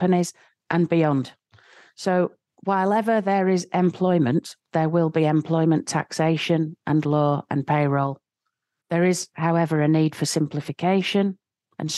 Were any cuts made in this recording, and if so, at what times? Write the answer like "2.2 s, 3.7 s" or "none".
none